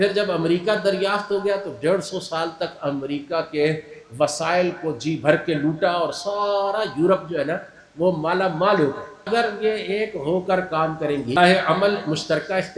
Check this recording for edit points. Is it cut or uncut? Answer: cut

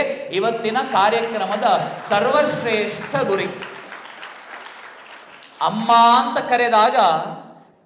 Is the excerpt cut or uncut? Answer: uncut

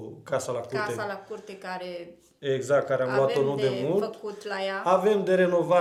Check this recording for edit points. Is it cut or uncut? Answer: uncut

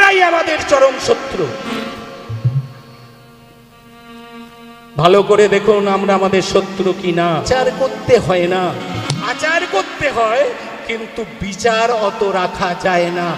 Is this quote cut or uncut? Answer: cut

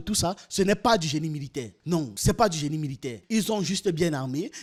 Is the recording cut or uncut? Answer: uncut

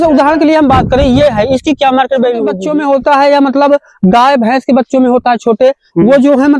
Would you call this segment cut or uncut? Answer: cut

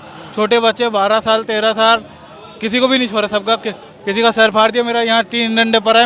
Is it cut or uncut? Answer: uncut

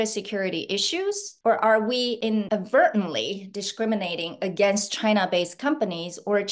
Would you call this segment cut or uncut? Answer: cut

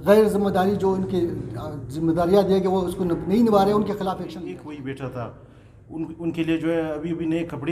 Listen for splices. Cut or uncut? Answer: cut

